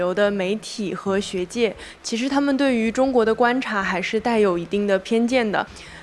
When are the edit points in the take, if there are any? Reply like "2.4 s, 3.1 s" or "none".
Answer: none